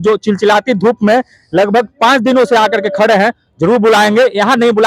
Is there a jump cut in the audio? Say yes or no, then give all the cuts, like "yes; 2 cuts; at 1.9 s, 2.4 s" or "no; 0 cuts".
no; 0 cuts